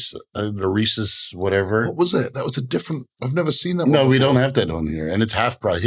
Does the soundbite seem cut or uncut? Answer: uncut